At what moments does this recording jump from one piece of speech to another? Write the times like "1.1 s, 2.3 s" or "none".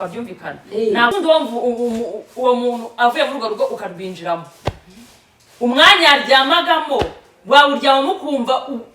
1.1 s